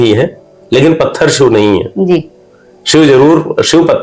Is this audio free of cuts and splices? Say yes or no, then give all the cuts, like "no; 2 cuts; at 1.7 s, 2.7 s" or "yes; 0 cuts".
yes; 0 cuts